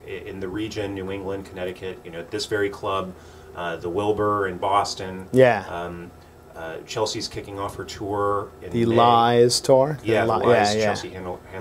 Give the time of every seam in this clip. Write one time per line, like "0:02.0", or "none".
0:01.6